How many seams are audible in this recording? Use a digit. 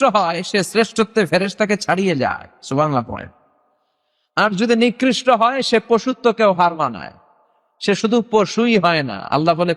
0